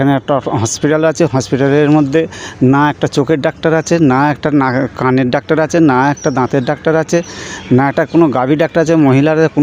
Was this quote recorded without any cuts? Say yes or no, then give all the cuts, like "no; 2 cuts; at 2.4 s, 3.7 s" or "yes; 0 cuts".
yes; 0 cuts